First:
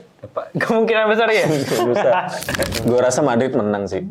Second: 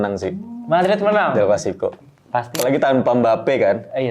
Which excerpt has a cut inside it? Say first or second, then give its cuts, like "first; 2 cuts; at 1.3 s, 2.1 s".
first; 1 cut; at 2.7 s